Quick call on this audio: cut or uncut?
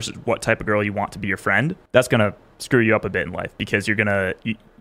cut